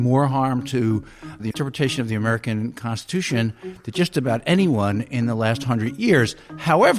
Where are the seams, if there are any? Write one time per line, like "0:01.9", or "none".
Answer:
0:01.5